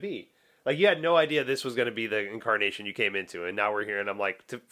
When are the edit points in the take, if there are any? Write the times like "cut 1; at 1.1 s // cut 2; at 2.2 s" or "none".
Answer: none